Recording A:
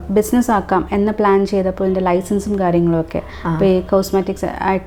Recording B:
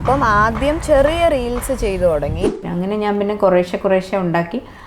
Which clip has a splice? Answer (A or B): B